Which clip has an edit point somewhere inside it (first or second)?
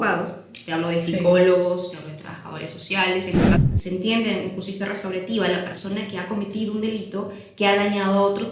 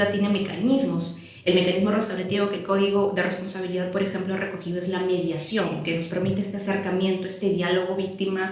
first